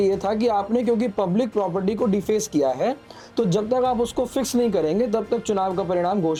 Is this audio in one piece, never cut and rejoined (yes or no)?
yes